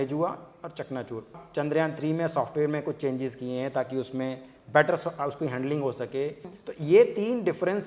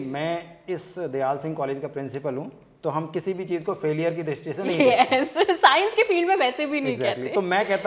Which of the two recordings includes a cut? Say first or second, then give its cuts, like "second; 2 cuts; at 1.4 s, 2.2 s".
first; 2 cuts; at 1.3 s, 6.6 s